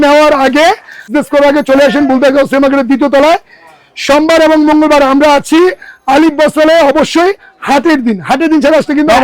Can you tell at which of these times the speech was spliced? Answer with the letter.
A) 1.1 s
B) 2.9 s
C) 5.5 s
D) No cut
A